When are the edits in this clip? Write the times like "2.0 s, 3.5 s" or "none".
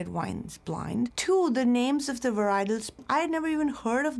1.2 s, 3.0 s